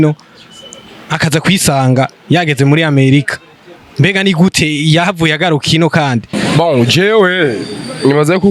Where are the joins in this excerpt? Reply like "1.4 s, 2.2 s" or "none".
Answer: 6.3 s